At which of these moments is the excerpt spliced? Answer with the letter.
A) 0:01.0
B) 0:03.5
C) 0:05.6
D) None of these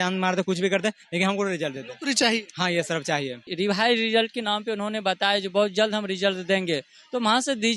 B